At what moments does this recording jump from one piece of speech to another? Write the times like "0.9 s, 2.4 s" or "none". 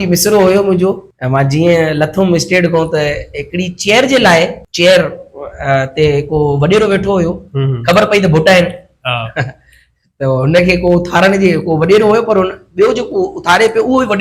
1.1 s, 4.6 s